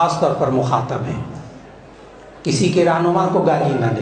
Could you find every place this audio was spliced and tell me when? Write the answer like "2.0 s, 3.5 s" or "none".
none

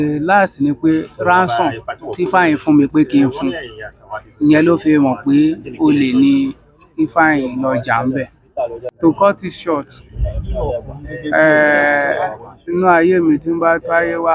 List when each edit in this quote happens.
8.8 s

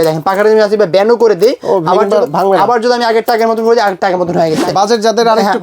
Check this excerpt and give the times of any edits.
4.6 s

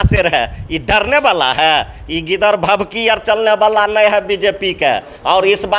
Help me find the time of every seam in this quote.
none

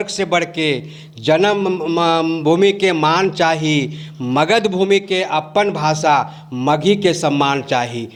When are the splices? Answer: none

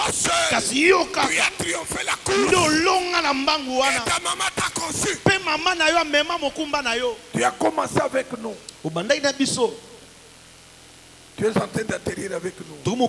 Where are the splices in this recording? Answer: 7.2 s

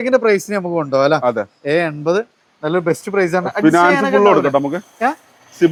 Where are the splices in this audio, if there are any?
none

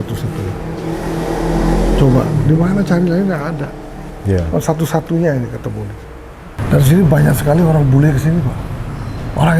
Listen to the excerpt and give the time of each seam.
6.6 s

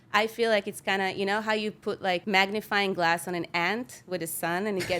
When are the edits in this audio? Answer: 2.2 s

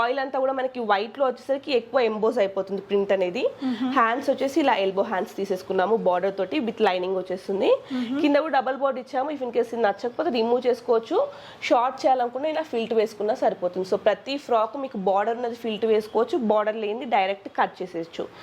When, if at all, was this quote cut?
none

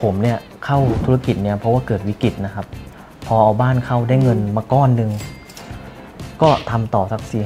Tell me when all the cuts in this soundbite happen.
2.6 s

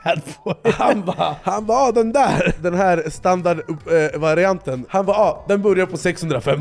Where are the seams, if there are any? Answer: 1.4 s, 2.6 s, 4.8 s

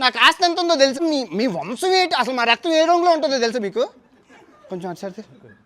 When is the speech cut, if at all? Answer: 1.0 s

